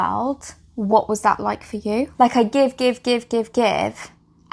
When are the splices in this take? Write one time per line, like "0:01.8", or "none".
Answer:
0:02.1